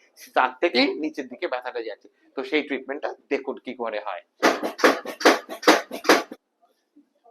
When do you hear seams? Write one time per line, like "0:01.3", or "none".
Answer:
0:04.4
0:06.3